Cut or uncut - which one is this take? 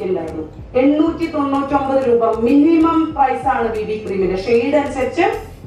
uncut